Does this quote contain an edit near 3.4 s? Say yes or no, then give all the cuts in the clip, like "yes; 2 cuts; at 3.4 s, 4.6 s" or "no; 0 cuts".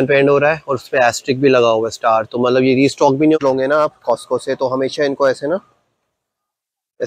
yes; 1 cut; at 3.4 s